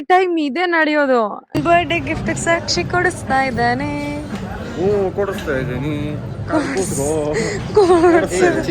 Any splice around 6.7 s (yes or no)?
no